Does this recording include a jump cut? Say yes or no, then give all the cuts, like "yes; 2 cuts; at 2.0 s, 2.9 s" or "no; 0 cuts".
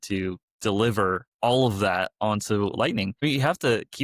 yes; 2 cuts; at 1.3 s, 3.2 s